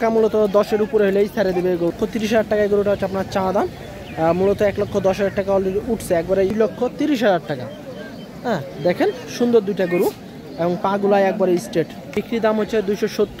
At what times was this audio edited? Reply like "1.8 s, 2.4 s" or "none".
1.9 s, 6.5 s, 12.1 s

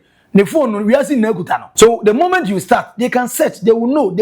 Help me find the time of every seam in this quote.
1.7 s

